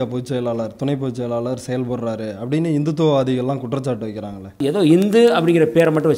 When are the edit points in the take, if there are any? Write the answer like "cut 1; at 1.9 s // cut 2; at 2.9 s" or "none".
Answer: cut 1; at 4.6 s